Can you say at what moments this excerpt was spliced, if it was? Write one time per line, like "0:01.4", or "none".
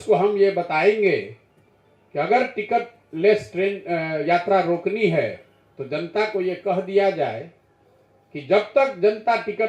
none